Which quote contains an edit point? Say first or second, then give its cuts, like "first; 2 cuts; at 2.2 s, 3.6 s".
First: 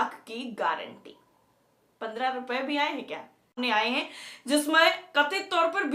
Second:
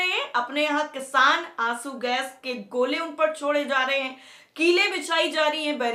first; 1 cut; at 3.6 s